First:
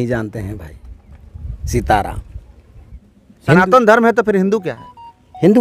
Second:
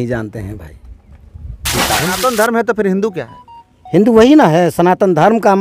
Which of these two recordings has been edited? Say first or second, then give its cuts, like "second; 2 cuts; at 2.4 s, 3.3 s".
second; 1 cut; at 1.9 s